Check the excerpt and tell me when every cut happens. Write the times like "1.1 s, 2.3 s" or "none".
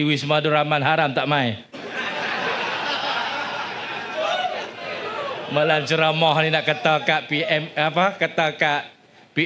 none

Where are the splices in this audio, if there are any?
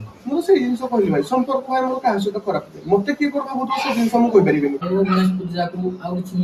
4.8 s

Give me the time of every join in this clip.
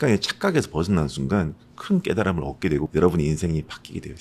2.9 s

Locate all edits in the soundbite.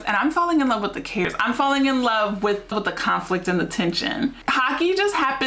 1.2 s, 2.7 s, 4.4 s

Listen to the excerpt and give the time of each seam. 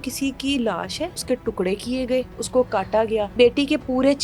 1.2 s, 2.4 s, 3.3 s

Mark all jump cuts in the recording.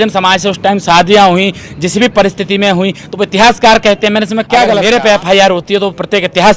4.8 s

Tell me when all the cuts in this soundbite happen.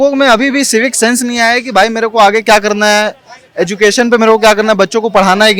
none

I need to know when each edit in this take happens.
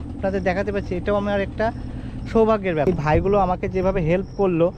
2.9 s

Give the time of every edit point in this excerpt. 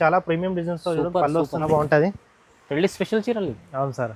1.7 s

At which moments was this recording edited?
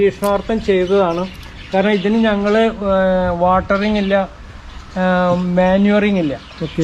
none

